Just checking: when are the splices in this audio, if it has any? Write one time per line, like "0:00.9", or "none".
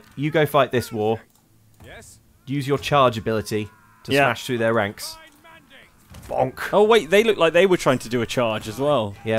none